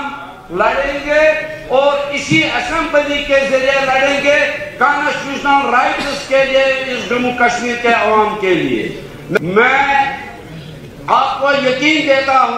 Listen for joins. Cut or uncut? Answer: cut